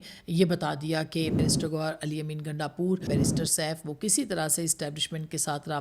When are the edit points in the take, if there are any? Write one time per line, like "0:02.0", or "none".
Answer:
0:01.4
0:03.1